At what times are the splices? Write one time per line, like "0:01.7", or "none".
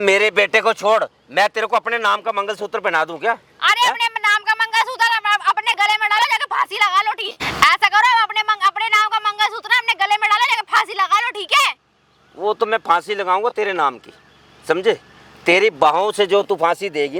none